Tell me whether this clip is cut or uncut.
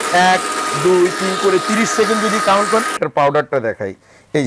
cut